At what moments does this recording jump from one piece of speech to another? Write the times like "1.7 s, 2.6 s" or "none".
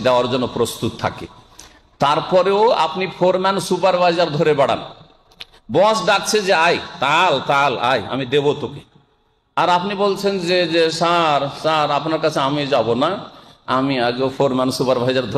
none